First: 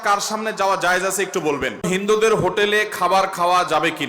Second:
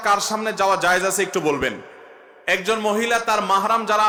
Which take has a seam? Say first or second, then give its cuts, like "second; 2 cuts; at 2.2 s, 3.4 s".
first; 1 cut; at 1.9 s